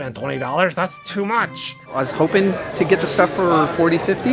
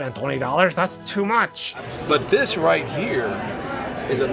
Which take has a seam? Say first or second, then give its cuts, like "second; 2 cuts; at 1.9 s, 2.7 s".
first; 1 cut; at 1.8 s